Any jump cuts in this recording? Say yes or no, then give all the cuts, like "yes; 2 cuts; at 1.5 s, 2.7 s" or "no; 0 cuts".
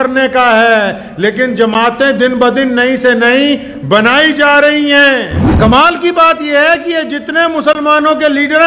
yes; 1 cut; at 5.4 s